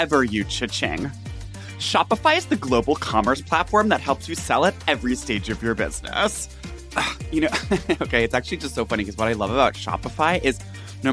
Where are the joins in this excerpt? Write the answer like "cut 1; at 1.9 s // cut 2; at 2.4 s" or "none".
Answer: cut 1; at 6.5 s